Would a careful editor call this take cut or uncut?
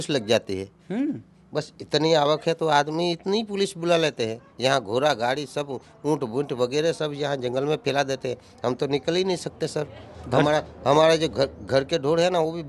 uncut